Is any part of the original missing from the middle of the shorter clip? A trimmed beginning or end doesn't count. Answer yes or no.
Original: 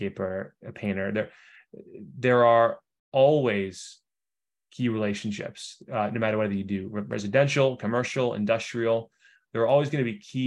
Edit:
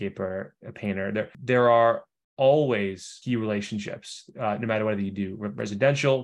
yes